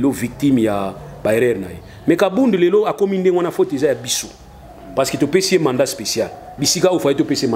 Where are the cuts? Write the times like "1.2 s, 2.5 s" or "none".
none